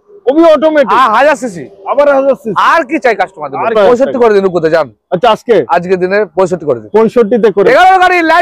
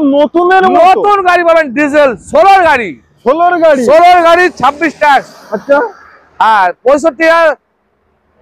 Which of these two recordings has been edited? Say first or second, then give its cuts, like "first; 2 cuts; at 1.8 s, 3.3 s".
first; 2 cuts; at 3.7 s, 7.6 s